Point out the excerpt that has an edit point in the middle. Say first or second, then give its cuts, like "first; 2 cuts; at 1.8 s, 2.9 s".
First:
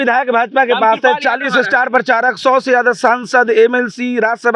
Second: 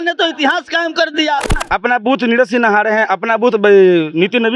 second; 1 cut; at 1.6 s